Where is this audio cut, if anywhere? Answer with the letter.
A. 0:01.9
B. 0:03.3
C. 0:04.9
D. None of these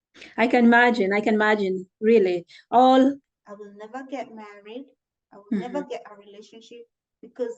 B